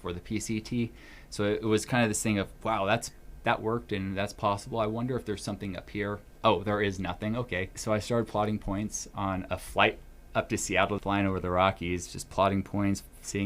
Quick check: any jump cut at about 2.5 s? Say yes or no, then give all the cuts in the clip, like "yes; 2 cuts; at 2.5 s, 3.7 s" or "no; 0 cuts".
no; 3 cuts; at 6.3 s, 7.7 s, 11.0 s